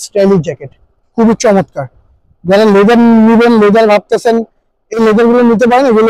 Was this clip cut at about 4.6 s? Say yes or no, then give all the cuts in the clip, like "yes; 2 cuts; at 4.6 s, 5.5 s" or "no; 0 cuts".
no; 0 cuts